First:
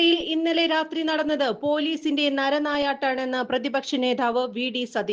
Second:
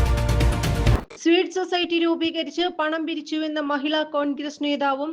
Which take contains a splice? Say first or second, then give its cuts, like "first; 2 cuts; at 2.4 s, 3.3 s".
second; 1 cut; at 1.0 s